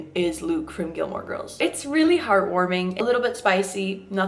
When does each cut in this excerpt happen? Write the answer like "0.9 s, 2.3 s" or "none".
none